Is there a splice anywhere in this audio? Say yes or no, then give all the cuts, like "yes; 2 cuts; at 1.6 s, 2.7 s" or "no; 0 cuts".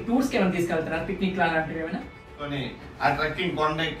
yes; 1 cut; at 2.3 s